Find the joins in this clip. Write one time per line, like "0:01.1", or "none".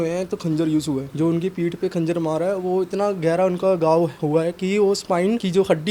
none